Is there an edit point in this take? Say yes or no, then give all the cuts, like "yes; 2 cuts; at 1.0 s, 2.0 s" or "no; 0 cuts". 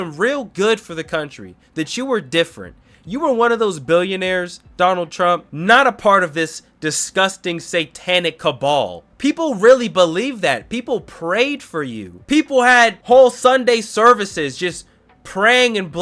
yes; 4 cuts; at 5.5 s, 9.0 s, 12.1 s, 13.0 s